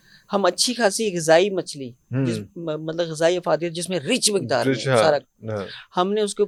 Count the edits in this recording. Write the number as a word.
zero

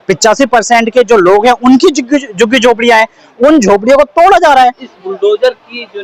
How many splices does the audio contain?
one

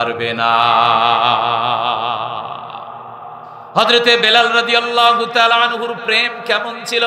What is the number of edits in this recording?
one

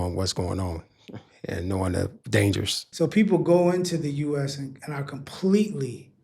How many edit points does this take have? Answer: one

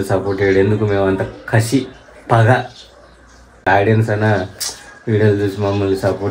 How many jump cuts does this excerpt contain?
one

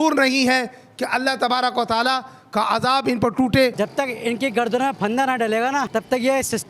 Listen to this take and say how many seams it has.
two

